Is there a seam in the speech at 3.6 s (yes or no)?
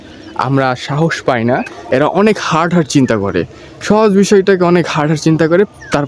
no